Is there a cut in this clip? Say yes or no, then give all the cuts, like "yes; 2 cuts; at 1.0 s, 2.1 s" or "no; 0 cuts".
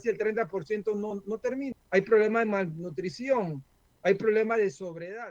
yes; 1 cut; at 1.3 s